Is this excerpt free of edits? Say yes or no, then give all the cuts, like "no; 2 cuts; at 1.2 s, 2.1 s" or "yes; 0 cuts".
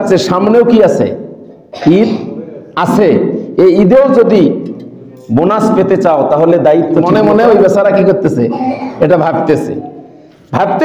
no; 1 cut; at 7.1 s